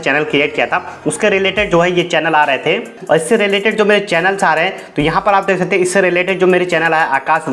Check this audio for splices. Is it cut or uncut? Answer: cut